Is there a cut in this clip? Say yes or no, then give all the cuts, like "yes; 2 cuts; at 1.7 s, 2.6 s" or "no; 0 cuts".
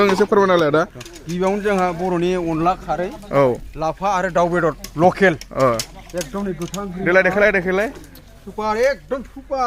no; 0 cuts